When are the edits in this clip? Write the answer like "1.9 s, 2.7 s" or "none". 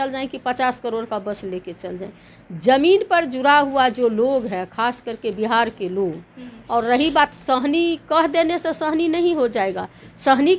none